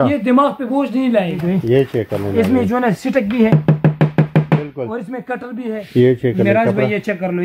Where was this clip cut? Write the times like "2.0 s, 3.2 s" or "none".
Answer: 1.4 s, 5.8 s